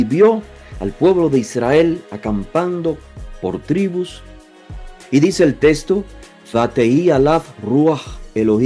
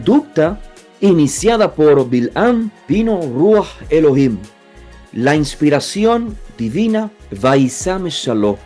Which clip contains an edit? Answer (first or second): second